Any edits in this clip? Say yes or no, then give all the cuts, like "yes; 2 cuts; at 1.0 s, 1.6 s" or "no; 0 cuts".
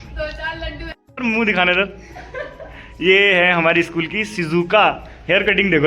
yes; 1 cut; at 1.0 s